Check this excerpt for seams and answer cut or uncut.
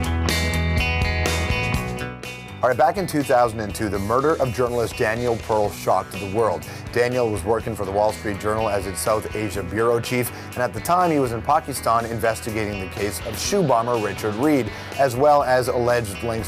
uncut